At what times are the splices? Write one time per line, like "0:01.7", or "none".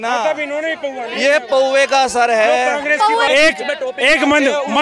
0:03.3